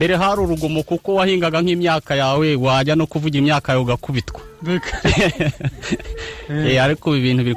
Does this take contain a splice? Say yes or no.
no